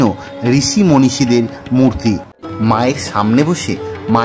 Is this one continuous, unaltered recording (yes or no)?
no